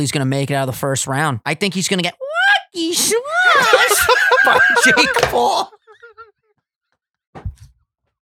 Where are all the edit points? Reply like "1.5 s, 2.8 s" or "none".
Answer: 1.4 s

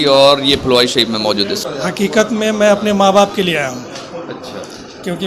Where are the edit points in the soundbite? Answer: 1.6 s

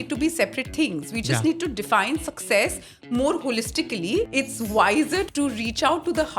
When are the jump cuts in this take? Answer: 4.3 s, 5.3 s

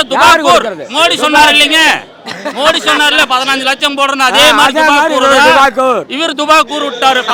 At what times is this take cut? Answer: none

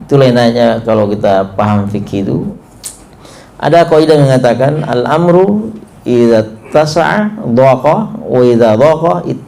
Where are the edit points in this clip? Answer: 2.5 s

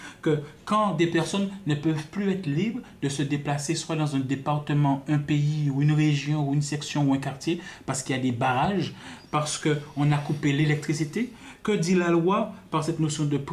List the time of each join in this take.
none

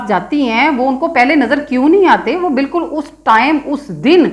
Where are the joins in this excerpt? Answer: none

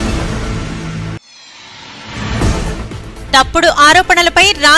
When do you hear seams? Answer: 1.2 s, 2.8 s

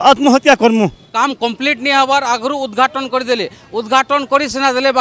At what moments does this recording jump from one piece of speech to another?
1.0 s

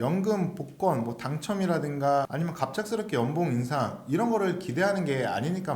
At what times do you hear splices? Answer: 2.3 s

